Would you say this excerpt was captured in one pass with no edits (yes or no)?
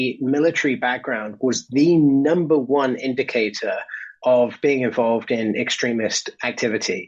yes